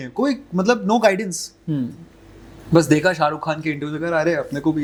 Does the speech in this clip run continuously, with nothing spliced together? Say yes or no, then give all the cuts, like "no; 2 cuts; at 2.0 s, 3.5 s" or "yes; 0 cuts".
yes; 0 cuts